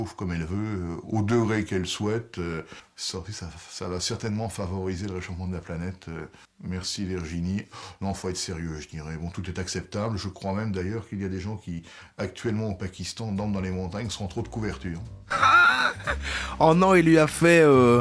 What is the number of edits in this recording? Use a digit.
1